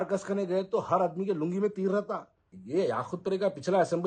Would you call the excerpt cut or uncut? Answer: cut